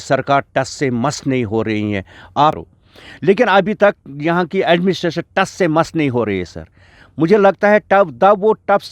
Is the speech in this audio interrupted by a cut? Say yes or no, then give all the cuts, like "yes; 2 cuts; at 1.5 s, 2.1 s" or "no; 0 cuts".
yes; 1 cut; at 2.6 s